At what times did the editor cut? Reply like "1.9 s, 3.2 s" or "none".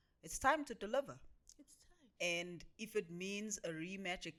none